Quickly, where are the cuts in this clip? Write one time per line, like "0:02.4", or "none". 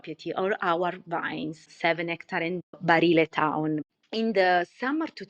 0:01.6
0:02.7
0:03.9

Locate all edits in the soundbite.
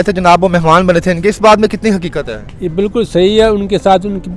none

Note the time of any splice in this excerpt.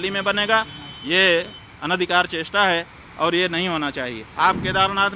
0:04.2

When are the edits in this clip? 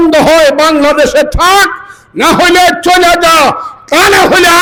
none

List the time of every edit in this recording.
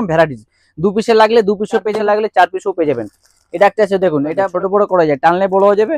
0:01.9
0:04.5

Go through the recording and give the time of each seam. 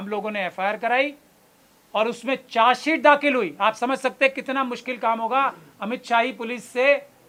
none

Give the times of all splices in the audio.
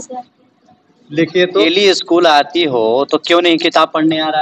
0:01.7

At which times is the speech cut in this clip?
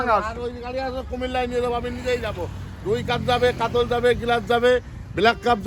none

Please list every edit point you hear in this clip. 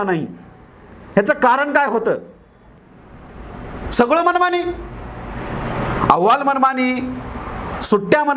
0:02.9

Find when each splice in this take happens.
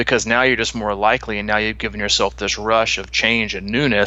none

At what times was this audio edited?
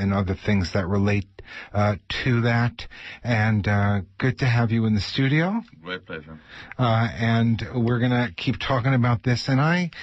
none

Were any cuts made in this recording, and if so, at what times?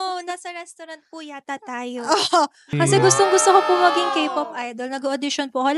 0:02.6

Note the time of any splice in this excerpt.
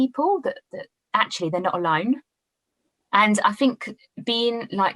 none

